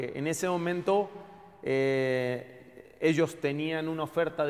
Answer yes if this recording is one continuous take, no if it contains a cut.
yes